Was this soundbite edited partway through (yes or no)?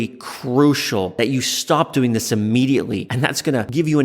yes